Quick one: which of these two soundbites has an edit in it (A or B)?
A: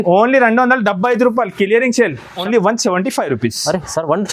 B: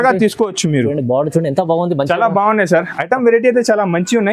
A